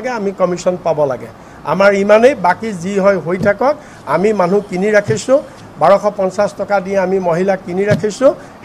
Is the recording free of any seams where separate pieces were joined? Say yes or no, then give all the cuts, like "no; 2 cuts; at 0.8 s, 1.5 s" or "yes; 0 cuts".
yes; 0 cuts